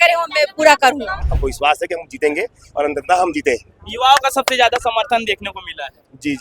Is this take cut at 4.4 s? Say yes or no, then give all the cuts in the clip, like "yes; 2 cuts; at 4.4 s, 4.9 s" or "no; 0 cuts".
no; 1 cut; at 1.2 s